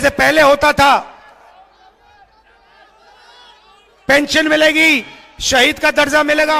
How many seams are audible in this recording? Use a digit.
0